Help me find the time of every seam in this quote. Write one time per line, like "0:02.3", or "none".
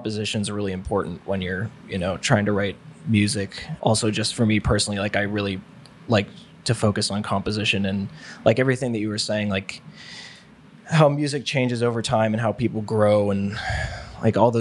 0:03.9